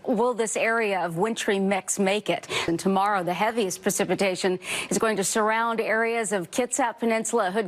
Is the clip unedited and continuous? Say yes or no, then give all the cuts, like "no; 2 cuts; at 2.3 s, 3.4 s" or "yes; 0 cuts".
no; 1 cut; at 2.6 s